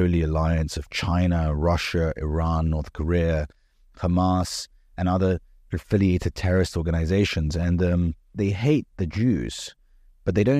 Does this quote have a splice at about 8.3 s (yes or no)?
yes